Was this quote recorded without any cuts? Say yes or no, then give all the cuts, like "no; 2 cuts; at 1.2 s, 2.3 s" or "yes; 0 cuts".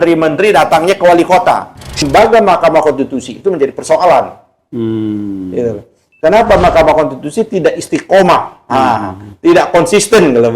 no; 1 cut; at 2.0 s